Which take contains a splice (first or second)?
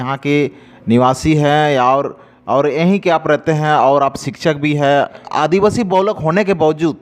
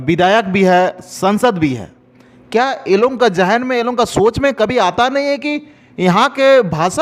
first